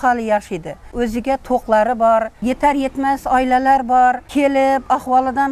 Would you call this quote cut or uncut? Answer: cut